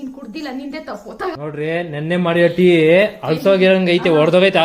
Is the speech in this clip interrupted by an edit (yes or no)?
yes